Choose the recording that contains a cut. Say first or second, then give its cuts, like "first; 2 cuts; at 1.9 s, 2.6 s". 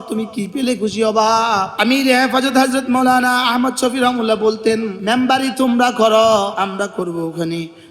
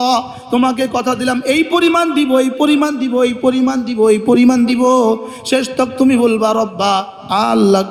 first; 3 cuts; at 1.7 s, 5.0 s, 6.5 s